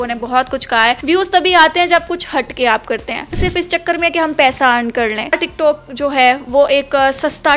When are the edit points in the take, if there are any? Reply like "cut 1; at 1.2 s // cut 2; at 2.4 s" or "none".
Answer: cut 1; at 1.0 s // cut 2; at 3.4 s // cut 3; at 5.4 s